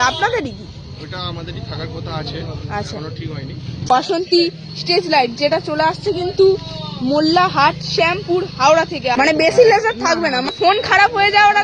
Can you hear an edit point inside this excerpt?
yes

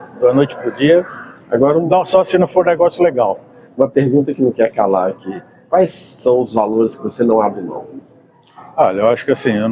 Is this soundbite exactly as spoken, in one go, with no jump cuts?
yes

